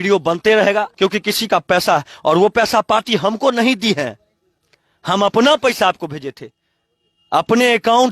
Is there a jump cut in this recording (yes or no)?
yes